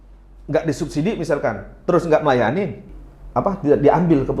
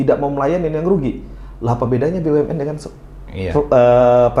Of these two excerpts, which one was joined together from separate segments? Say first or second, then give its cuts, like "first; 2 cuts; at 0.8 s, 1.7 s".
first; 1 cut; at 2.9 s